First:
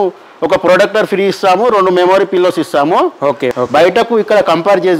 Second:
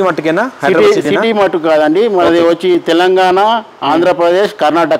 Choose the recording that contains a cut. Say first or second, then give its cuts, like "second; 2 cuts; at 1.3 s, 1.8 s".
first; 1 cut; at 3.5 s